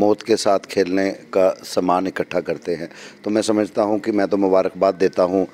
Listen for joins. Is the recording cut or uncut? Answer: uncut